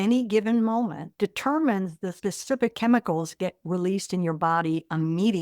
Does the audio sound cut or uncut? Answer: cut